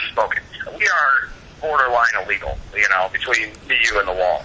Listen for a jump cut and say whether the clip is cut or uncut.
uncut